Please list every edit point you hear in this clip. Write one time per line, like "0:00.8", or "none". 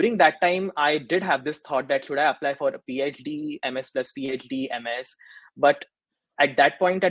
none